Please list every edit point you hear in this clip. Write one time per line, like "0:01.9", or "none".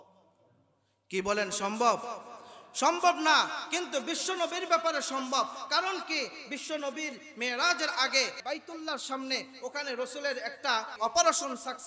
0:08.4
0:11.0